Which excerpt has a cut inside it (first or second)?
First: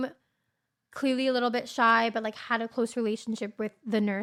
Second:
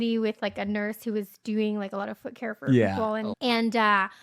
second